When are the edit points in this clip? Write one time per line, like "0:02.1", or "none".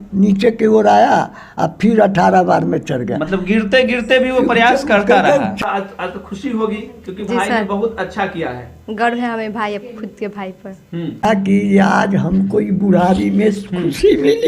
0:05.6
0:11.2